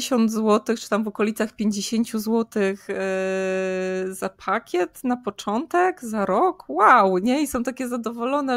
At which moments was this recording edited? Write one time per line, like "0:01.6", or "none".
none